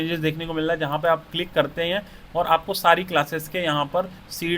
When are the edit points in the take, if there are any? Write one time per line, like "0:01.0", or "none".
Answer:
none